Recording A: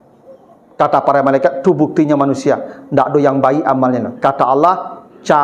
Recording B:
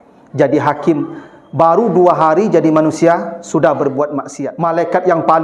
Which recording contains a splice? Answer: B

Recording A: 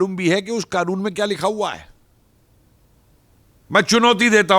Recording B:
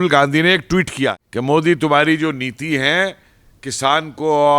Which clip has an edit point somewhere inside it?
B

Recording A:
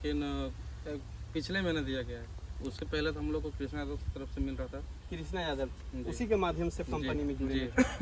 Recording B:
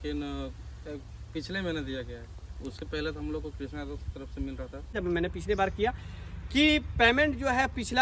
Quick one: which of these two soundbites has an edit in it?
B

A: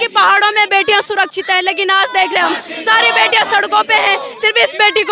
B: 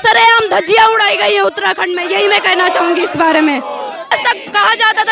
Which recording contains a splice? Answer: B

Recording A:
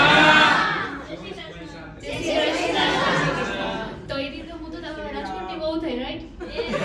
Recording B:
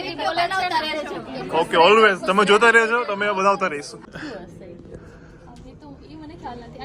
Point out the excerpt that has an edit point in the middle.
B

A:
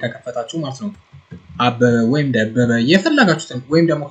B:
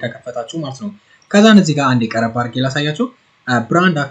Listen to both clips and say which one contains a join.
A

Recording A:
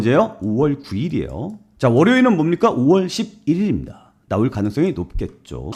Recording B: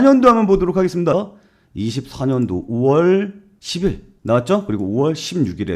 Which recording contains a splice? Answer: B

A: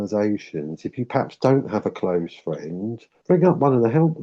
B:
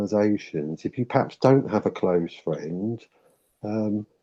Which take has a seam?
A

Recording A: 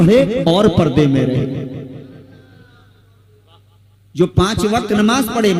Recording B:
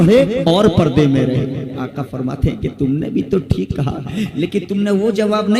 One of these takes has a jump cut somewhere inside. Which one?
B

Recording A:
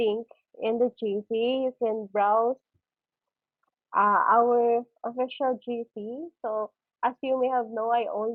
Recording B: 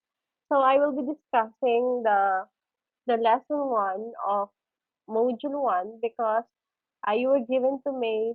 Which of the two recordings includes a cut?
B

